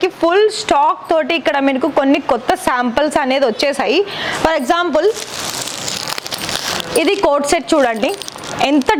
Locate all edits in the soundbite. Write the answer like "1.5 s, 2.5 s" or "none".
none